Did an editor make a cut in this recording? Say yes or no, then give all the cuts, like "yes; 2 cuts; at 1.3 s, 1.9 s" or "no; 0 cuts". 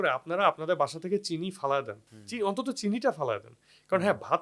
no; 0 cuts